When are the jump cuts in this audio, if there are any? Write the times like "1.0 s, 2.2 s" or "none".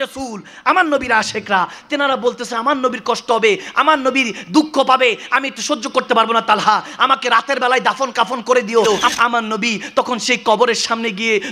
8.8 s